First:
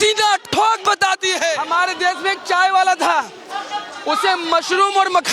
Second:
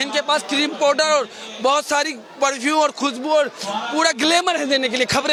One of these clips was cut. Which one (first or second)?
first